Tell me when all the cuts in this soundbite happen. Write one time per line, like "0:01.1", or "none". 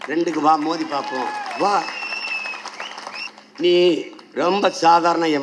0:03.2